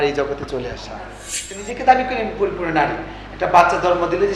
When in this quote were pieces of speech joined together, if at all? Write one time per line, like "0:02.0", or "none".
0:01.6